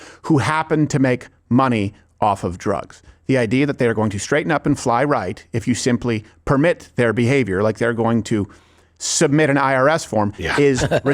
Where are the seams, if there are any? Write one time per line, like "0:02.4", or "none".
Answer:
none

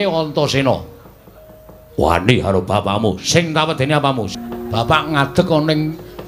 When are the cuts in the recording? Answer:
0:04.3

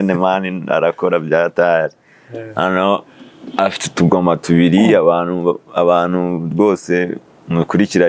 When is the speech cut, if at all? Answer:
none

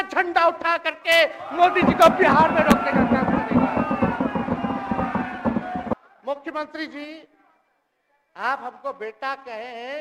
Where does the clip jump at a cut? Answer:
0:06.0

